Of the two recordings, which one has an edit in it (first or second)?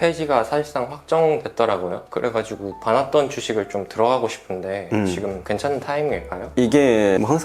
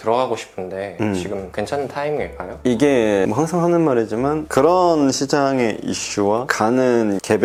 first